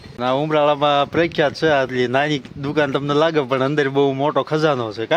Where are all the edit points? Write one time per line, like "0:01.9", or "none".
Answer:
none